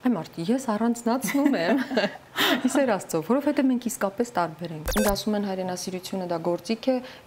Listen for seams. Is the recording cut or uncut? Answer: cut